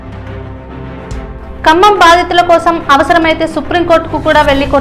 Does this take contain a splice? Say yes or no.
yes